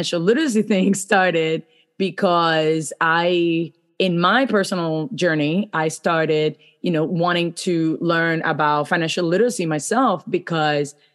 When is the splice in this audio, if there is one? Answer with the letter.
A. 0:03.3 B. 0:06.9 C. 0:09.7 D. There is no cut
D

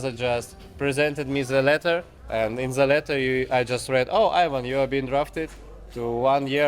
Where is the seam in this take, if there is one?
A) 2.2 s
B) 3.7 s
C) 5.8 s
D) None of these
A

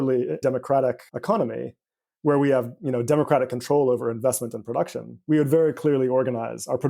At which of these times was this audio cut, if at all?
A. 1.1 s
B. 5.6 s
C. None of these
A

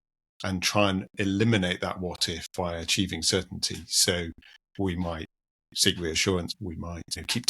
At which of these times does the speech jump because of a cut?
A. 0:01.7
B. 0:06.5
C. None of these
B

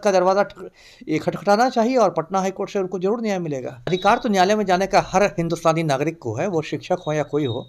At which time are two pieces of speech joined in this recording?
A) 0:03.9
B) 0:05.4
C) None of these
A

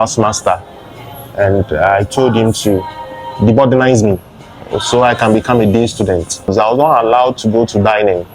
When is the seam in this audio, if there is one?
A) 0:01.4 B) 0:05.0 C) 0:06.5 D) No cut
C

